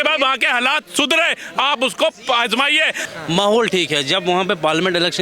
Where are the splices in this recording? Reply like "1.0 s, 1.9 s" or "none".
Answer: 3.0 s